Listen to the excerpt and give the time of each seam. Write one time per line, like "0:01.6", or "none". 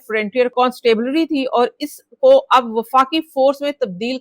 none